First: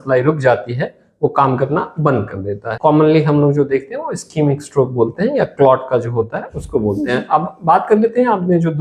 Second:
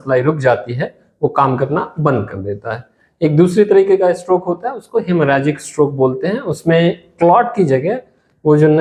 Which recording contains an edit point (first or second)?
first